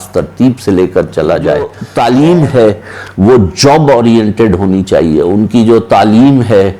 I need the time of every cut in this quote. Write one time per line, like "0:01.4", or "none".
0:01.8